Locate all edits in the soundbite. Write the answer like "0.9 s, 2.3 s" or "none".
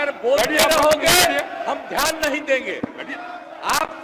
none

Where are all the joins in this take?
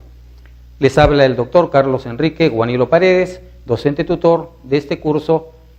none

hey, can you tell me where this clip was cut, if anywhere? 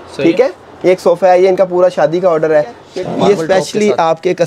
2.9 s

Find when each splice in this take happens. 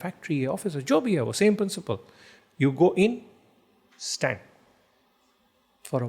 none

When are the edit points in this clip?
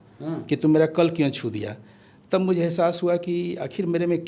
none

